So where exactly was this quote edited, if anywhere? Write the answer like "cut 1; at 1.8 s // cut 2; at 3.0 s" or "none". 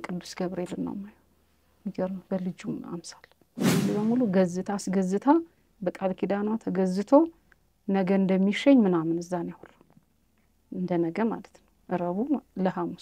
cut 1; at 3.7 s